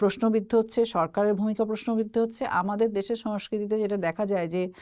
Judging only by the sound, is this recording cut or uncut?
uncut